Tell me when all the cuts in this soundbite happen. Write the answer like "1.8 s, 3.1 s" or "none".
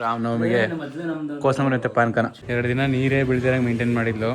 2.4 s

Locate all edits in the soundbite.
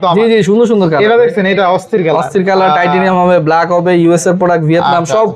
none

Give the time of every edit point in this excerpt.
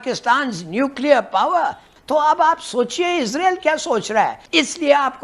1.8 s, 4.4 s

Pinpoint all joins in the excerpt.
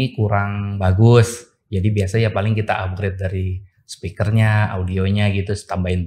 none

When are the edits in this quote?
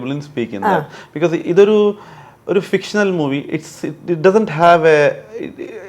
none

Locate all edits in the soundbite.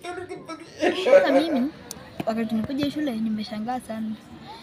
1.2 s

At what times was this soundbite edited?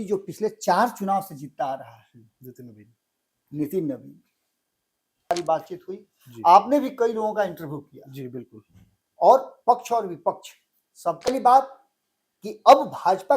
5.3 s, 11.3 s

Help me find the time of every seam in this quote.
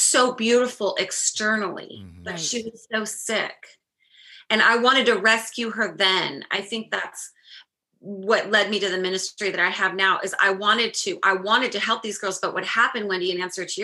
none

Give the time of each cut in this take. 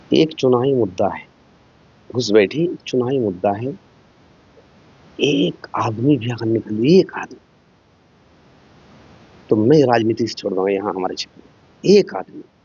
none

